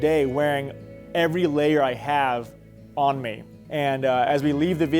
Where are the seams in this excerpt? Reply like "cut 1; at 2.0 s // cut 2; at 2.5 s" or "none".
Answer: cut 1; at 3.5 s